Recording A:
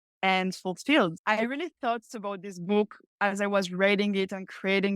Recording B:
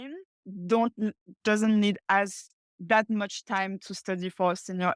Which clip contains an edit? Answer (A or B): A